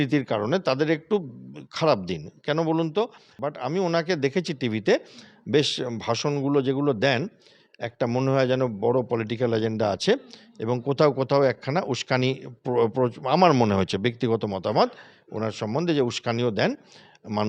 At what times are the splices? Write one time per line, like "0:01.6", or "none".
0:03.5